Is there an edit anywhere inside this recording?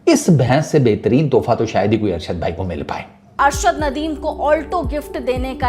yes; 1 cut; at 3.4 s

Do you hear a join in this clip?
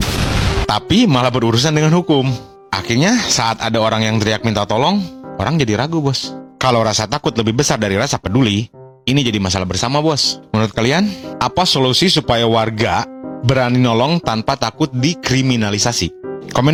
no; 0 cuts

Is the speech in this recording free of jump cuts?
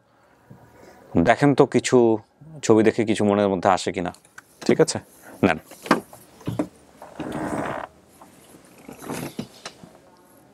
yes; 0 cuts

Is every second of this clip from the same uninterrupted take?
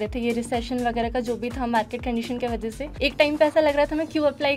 no; 1 cut; at 2.9 s

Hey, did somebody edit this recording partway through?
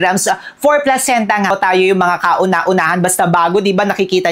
yes; 1 cut; at 1.5 s

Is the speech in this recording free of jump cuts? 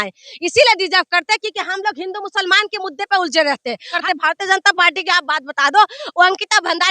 no; 1 cut; at 3.9 s

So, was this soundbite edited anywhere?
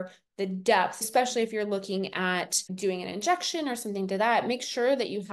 yes; 2 cuts; at 1.1 s, 2.6 s

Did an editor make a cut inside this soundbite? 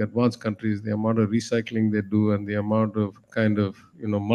yes; 1 cut; at 3.2 s

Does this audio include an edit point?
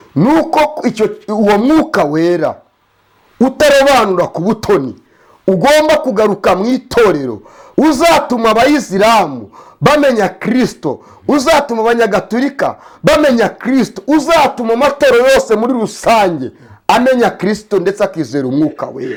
no; 0 cuts

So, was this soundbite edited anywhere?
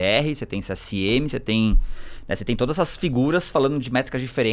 no; 0 cuts

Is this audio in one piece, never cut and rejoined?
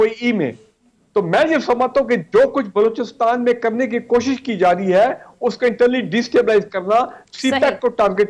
yes; 0 cuts

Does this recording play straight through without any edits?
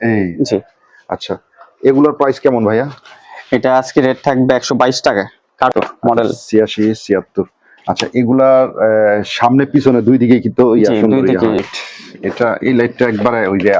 no; 2 cuts; at 5.7 s, 11.6 s

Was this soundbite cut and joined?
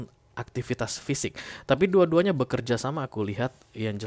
no; 0 cuts

